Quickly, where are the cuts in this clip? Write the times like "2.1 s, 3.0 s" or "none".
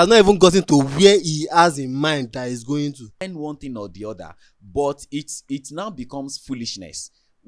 3.3 s